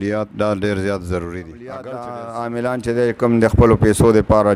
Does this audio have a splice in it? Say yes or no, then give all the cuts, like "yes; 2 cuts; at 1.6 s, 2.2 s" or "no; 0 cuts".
yes; 1 cut; at 1.8 s